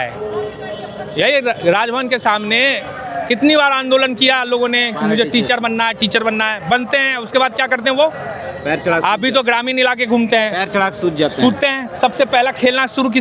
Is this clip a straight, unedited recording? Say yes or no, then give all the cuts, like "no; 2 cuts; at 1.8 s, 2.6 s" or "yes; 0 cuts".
yes; 0 cuts